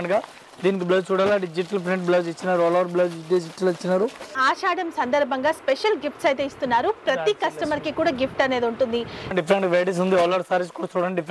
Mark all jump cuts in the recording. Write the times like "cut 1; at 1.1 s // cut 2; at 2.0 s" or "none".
cut 1; at 4.4 s // cut 2; at 9.3 s